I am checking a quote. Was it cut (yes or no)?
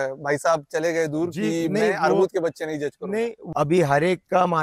yes